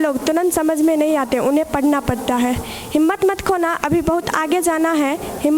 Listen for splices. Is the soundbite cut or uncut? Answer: uncut